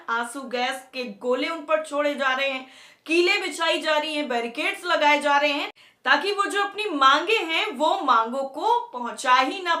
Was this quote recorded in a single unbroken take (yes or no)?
yes